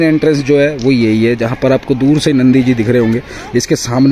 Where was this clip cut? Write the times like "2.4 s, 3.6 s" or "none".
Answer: none